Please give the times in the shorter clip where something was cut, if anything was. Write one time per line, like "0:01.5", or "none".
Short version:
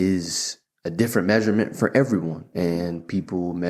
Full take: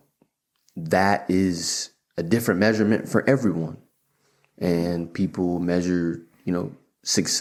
0:02.4